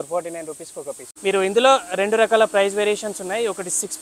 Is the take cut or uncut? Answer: cut